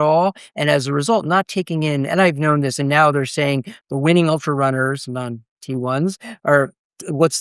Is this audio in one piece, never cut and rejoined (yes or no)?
no